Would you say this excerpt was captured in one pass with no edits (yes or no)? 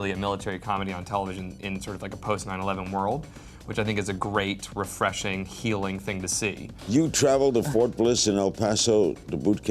no